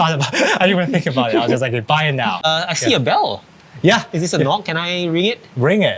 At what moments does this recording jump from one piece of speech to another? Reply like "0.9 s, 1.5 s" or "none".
2.4 s